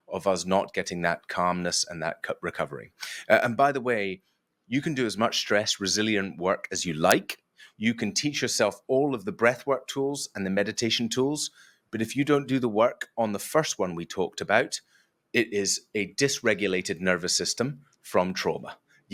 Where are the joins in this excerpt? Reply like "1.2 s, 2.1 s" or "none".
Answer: none